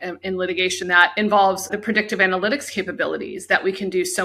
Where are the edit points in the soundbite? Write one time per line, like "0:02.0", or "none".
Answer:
0:01.0

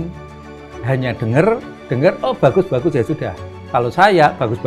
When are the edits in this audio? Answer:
none

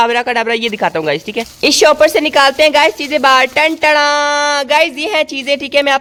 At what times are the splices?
none

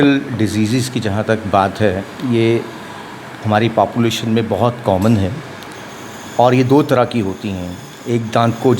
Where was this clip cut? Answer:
none

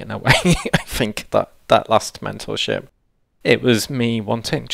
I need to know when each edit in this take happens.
none

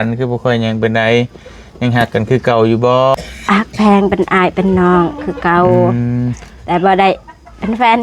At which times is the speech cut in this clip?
0:03.1

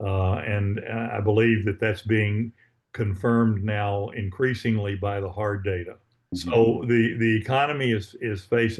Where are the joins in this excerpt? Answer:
0:06.1

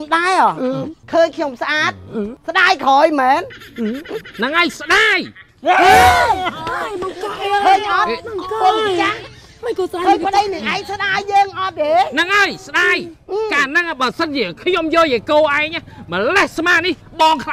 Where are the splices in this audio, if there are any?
0:01.0
0:02.4

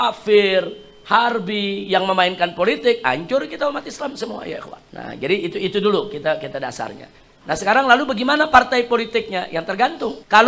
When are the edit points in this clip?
none

